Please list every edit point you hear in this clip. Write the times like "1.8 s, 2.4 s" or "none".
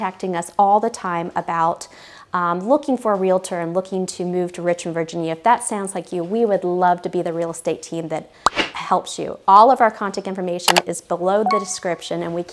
none